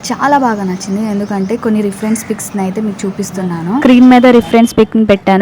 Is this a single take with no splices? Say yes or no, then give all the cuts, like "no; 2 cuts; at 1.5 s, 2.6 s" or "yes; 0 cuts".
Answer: no; 1 cut; at 3.8 s